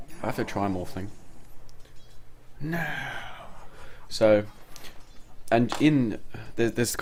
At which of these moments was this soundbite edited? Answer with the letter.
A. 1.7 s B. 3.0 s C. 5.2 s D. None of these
D